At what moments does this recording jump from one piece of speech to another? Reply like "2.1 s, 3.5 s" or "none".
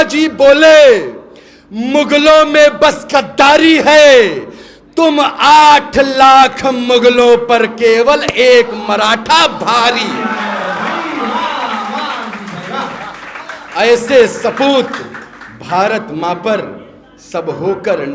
none

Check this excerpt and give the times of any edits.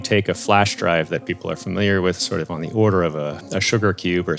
2.2 s, 3.4 s

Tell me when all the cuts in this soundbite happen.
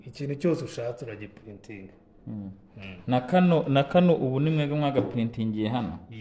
none

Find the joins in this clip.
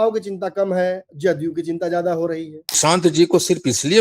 2.8 s

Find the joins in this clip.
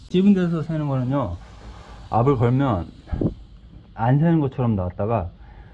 none

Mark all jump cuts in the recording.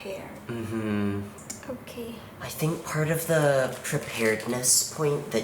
1.3 s

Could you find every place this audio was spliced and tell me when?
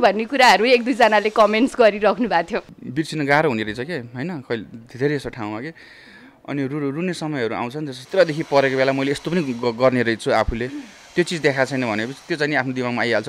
2.8 s, 8.0 s

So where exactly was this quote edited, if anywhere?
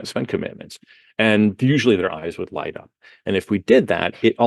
none

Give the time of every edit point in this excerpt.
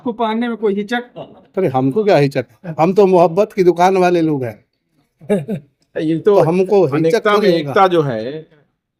none

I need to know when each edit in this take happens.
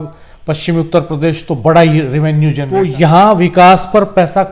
2.6 s

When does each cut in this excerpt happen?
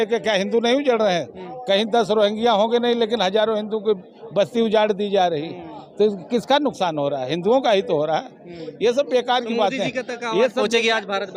none

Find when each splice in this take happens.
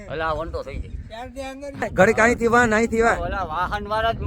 1.9 s

